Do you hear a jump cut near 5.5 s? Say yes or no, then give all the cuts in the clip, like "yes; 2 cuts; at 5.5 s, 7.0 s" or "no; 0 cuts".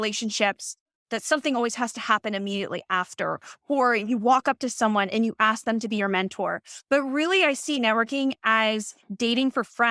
no; 0 cuts